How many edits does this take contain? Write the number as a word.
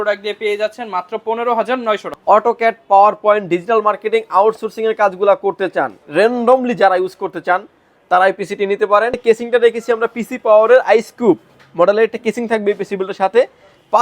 two